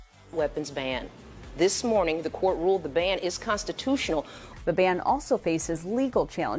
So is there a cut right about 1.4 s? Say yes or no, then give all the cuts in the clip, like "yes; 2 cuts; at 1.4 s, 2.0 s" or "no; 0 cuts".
no; 1 cut; at 4.5 s